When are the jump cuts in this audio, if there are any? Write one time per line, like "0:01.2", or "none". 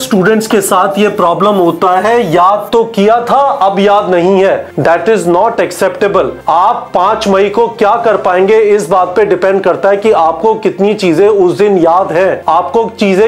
0:04.7
0:06.4
0:12.4